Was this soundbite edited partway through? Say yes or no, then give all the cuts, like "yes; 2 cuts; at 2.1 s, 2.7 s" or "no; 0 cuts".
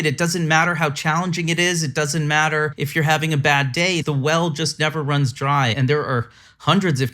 yes; 3 cuts; at 2.8 s, 4.0 s, 5.7 s